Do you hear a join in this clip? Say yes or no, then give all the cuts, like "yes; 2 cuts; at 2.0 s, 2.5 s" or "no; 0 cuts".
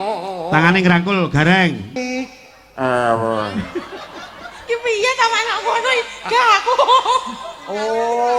yes; 1 cut; at 1.9 s